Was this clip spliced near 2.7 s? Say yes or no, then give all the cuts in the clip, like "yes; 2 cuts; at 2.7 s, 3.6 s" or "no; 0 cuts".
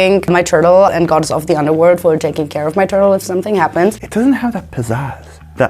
no; 2 cuts; at 0.9 s, 4.0 s